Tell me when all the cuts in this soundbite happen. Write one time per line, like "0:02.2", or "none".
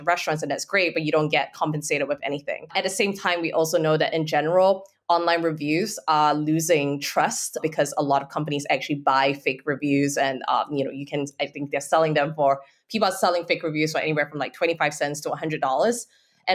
0:02.7
0:07.6